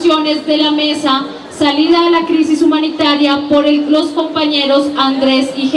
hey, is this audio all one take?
no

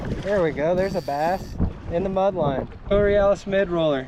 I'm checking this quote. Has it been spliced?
yes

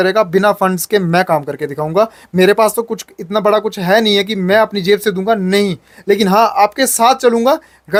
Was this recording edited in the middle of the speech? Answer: no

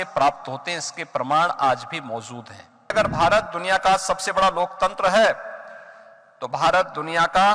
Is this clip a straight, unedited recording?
no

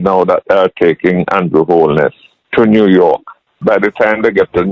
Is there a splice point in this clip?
yes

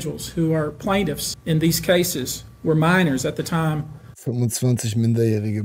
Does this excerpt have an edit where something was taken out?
yes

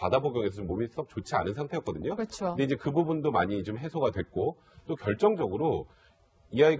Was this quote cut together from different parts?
no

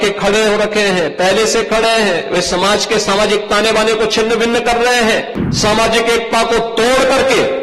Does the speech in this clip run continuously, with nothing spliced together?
no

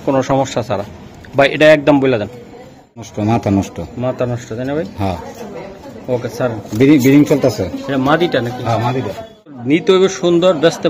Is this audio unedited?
no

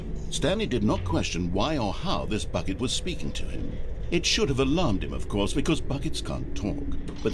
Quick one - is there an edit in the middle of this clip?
no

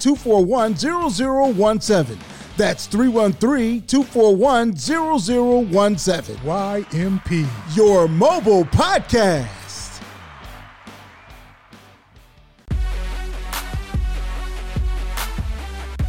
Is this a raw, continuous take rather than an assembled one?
no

